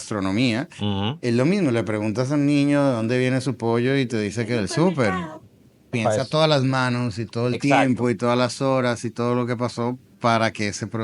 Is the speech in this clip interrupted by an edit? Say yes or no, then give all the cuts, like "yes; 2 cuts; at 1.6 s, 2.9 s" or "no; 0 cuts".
yes; 1 cut; at 5.9 s